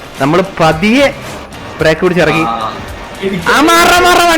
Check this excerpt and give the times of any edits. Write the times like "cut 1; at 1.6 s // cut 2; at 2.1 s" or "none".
none